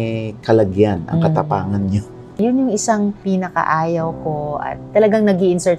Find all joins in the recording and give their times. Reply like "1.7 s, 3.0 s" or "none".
2.0 s